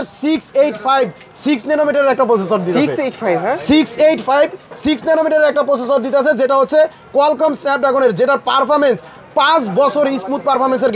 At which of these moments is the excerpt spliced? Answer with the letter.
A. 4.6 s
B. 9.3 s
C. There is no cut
C